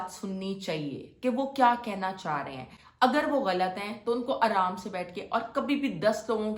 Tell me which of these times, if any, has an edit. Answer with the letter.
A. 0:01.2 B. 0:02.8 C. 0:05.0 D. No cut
D